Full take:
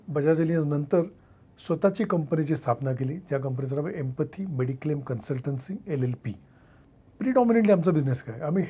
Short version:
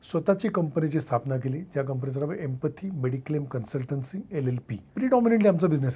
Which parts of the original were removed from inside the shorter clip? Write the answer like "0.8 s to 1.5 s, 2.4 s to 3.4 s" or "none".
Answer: 6.3 s to 7.0 s